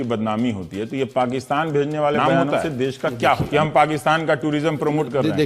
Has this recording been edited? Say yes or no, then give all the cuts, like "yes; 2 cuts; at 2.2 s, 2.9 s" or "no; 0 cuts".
yes; 1 cut; at 3.4 s